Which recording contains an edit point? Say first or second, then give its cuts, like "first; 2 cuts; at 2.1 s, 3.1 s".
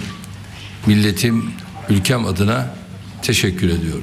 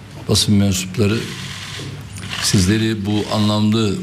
first; 1 cut; at 1.8 s